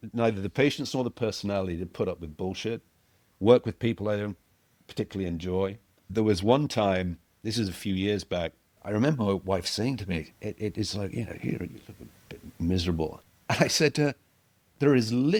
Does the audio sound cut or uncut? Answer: uncut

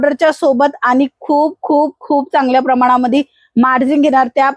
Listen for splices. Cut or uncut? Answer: uncut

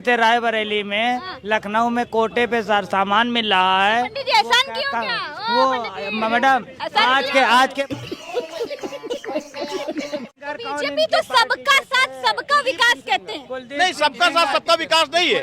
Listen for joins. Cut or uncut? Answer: cut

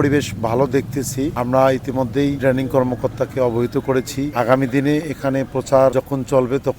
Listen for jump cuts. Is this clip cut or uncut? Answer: cut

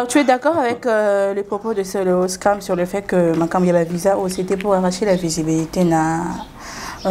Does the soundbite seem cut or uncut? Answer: uncut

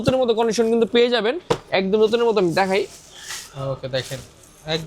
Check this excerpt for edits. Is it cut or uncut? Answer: uncut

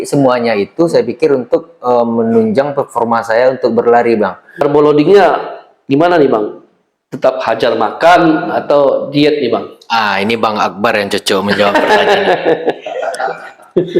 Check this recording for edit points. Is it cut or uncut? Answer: cut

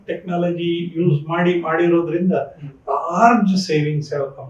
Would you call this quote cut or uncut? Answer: uncut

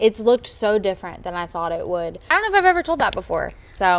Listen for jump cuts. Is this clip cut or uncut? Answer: cut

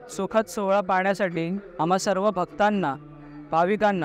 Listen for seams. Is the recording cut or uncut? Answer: uncut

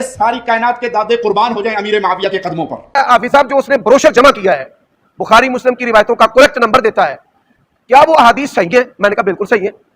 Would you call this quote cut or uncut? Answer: cut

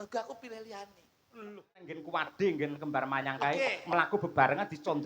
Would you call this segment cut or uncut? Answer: cut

